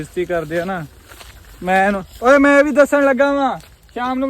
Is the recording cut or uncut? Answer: uncut